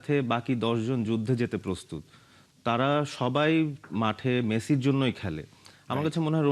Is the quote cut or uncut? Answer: uncut